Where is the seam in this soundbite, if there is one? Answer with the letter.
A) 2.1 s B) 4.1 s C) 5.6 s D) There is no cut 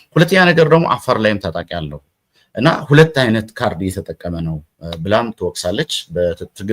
D